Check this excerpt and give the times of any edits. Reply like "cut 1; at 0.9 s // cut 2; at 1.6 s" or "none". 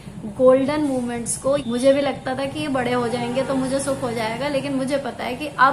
cut 1; at 1.6 s